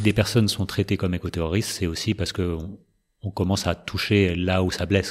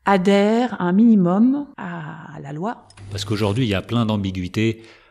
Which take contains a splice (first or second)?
second